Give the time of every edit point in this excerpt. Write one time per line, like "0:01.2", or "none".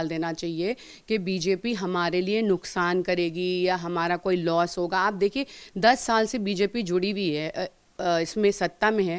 none